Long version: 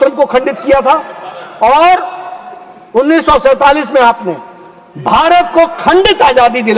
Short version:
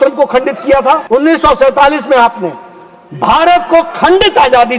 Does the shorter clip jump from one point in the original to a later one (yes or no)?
yes